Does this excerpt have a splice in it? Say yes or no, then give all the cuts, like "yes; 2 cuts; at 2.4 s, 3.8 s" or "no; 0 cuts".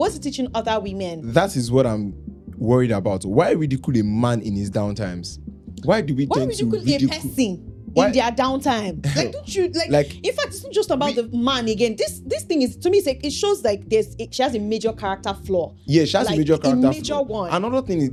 no; 0 cuts